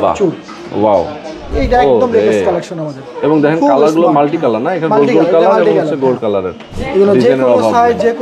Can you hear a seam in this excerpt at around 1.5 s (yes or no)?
yes